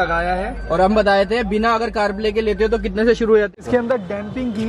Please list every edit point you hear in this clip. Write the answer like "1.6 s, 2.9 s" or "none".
3.6 s